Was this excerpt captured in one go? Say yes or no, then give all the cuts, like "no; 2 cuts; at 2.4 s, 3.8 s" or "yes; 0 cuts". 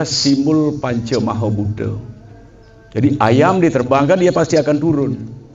yes; 0 cuts